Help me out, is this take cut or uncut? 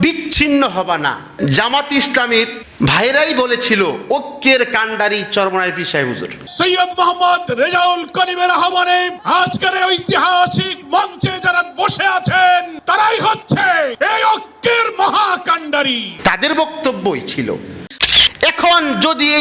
cut